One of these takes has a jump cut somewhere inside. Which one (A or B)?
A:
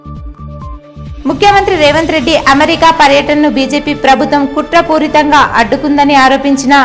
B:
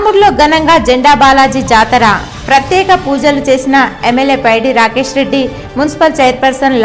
A